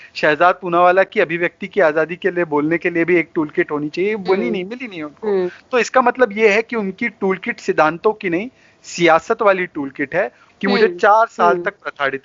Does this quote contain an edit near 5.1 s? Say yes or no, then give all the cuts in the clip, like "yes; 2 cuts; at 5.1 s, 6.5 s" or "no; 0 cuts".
no; 1 cut; at 10.4 s